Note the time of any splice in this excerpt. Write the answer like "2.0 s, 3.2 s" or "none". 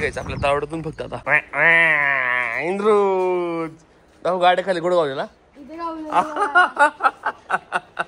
1.2 s